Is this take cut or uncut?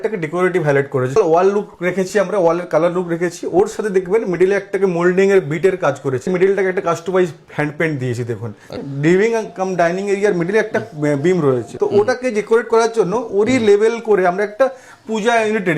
cut